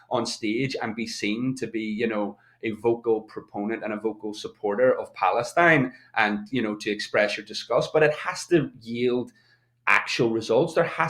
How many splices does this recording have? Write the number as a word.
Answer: zero